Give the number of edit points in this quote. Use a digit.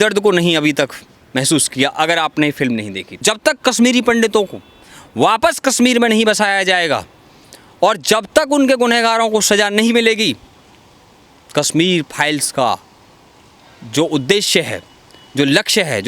1